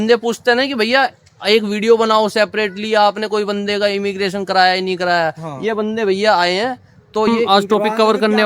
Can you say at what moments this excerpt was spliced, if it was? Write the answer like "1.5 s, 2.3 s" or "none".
7.4 s